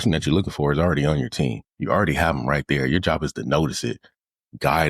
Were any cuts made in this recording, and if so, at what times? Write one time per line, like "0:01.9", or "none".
0:01.7